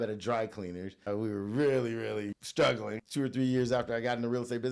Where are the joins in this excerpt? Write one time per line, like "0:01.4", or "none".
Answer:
0:01.0
0:02.3
0:03.0

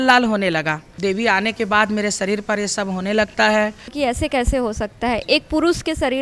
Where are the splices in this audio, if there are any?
0:00.9
0:03.9

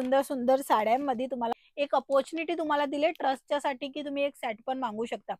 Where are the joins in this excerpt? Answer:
0:01.5

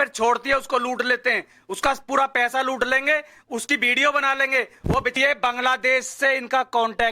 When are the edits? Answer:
0:05.2

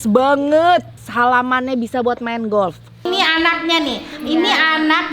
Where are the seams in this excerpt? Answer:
0:01.0
0:03.1

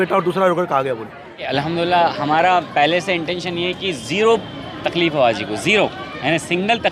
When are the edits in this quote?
0:01.5

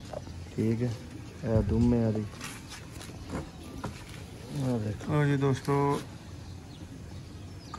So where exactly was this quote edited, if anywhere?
none

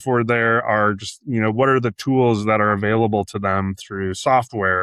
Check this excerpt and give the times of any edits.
none

